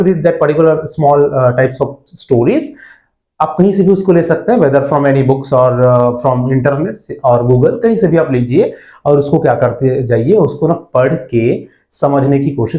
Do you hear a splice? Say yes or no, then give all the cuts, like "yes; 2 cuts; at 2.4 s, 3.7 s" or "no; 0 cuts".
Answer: no; 0 cuts